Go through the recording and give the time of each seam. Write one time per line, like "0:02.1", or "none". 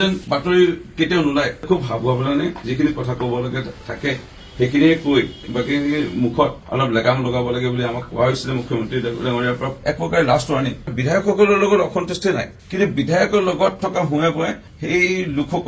0:01.6
0:09.8
0:10.8